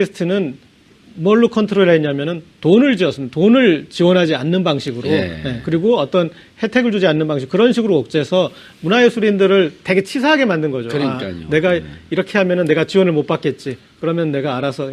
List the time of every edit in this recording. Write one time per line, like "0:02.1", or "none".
none